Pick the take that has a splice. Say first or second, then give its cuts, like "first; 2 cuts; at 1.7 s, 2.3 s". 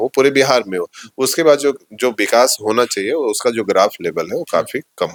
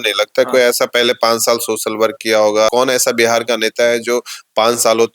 second; 1 cut; at 2.7 s